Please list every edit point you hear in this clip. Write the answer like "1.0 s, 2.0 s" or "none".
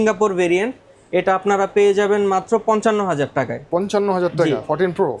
none